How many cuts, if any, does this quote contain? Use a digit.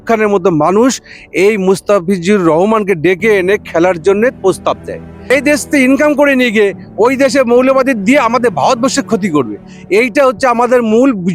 1